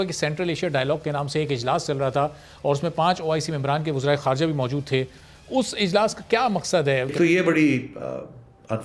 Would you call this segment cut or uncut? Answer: cut